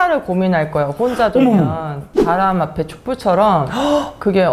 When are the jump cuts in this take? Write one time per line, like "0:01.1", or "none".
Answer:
0:02.0